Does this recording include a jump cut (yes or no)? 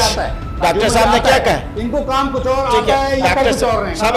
no